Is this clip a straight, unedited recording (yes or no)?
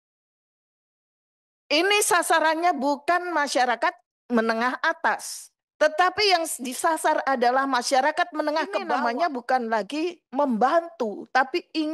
no